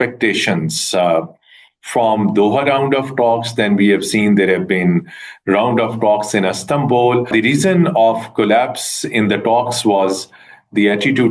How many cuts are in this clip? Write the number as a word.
one